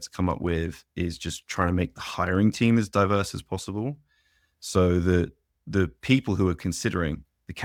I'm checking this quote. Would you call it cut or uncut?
uncut